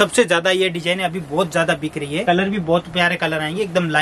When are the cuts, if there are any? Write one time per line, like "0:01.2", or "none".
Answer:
0:02.2